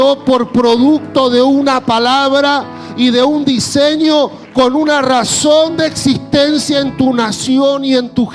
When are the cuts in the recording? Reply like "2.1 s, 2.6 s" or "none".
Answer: none